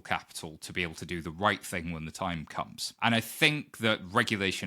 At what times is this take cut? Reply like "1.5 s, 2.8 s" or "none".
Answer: 2.8 s